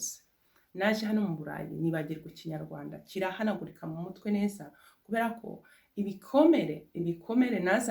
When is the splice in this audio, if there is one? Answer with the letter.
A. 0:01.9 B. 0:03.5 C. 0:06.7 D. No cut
D